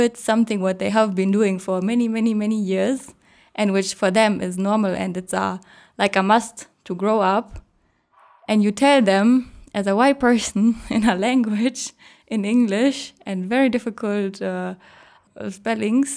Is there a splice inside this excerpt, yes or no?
yes